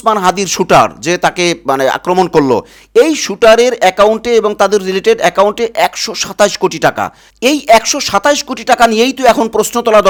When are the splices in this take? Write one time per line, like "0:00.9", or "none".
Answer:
none

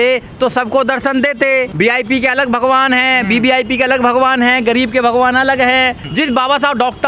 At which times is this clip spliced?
0:01.7
0:06.0

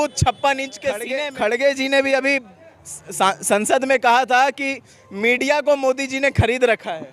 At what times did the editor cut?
0:01.1

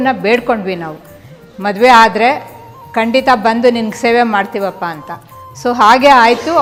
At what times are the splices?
none

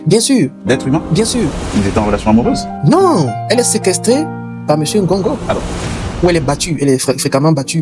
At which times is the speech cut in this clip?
0:01.6
0:05.7

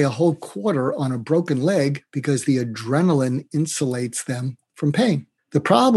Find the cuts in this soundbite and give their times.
0:02.1

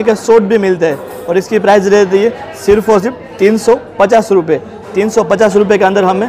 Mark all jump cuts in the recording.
none

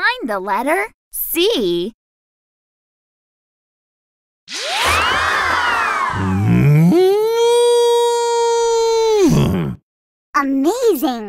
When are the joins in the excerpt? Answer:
0:01.0

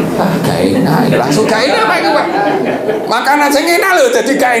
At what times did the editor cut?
none

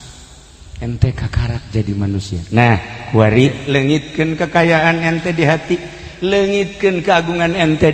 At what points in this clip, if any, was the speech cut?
0:03.6

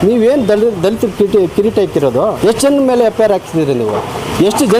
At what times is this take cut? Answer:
0:02.3

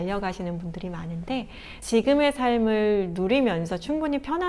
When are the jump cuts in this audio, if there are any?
0:01.6

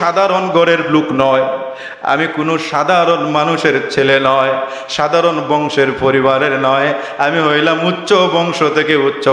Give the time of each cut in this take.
none

